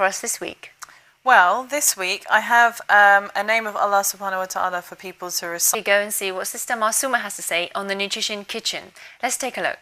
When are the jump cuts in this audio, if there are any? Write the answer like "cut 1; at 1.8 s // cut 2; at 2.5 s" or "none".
none